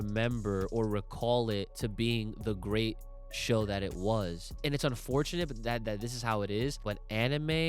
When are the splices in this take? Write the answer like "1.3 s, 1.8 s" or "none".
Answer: 1.7 s, 4.6 s, 6.8 s